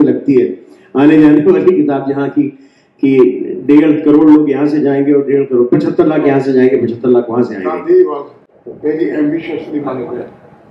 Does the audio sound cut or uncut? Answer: uncut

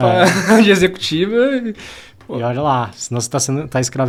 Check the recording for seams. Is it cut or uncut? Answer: uncut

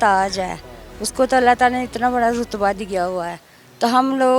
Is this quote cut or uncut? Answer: uncut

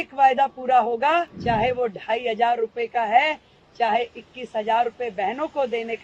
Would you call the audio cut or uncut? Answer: cut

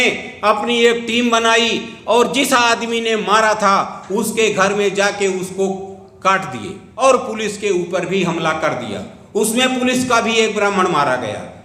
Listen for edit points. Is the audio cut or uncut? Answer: cut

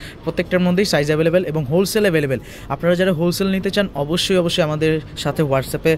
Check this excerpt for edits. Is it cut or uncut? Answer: uncut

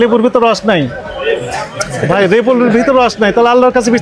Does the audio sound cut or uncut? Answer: uncut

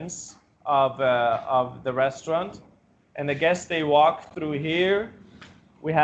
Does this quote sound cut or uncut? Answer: uncut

